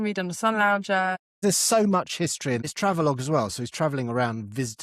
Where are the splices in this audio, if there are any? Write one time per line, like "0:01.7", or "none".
0:01.3
0:02.7